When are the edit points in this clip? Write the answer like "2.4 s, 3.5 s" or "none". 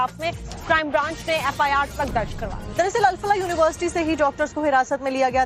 3.5 s

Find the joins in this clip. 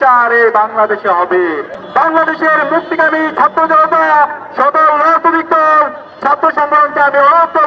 1.8 s

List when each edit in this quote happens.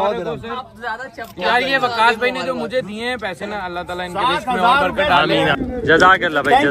5.6 s

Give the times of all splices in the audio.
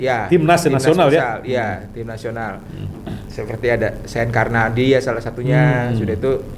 none

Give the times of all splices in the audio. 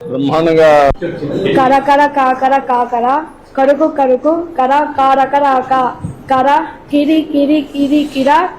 0.9 s

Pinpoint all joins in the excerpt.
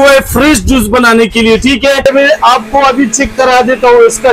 2.1 s

